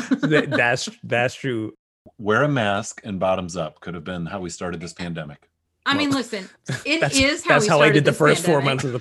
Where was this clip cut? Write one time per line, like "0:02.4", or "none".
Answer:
0:01.8